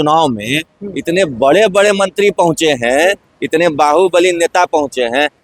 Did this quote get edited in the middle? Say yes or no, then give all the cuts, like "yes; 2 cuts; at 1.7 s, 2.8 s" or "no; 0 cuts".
no; 0 cuts